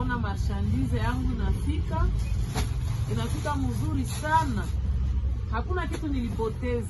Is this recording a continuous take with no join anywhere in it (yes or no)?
yes